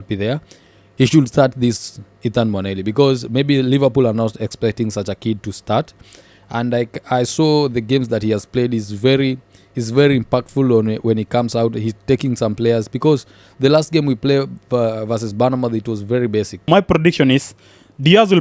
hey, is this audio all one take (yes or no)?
no